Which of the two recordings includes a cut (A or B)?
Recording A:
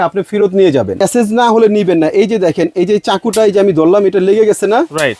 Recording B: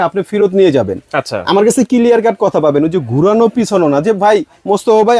A